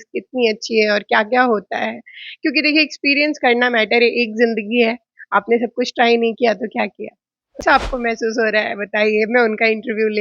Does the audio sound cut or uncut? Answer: cut